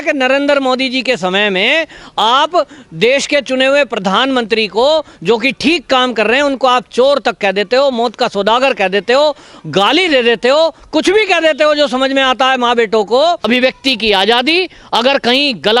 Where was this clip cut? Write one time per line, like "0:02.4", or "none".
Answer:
0:13.4